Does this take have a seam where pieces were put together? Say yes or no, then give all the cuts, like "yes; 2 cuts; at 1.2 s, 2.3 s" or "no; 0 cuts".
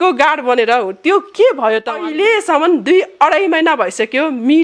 yes; 1 cut; at 2.0 s